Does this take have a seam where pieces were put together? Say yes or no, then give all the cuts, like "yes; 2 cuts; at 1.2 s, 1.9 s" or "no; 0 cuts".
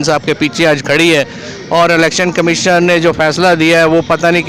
no; 0 cuts